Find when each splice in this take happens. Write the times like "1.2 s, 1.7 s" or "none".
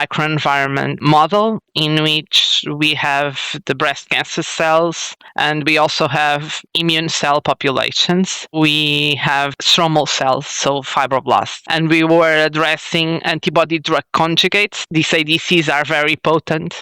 8.5 s, 14.7 s